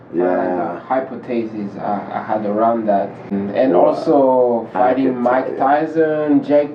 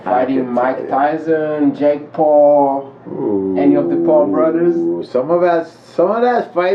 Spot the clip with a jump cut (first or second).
first